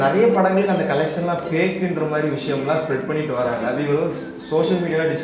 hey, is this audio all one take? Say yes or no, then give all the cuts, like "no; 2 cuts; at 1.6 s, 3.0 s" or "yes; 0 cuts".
yes; 0 cuts